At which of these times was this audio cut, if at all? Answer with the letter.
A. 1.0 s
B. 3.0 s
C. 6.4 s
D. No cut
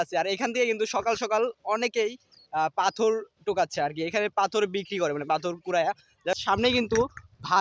C